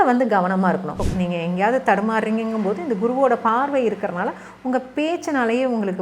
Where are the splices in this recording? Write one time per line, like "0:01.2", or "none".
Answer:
0:00.9